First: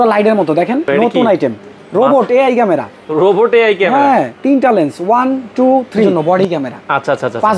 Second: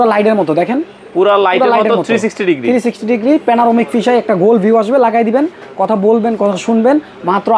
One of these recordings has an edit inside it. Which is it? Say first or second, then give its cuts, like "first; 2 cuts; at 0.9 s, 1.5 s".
first; 2 cuts; at 1.0 s, 6.2 s